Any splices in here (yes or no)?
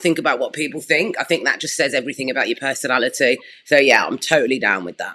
no